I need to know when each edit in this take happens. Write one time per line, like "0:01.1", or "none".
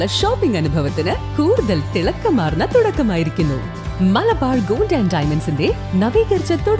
none